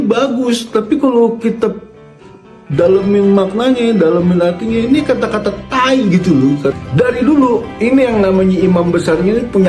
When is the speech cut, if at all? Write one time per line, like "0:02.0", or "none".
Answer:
0:06.8